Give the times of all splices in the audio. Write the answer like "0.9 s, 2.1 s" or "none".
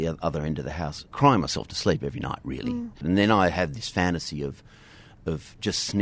1.0 s, 3.0 s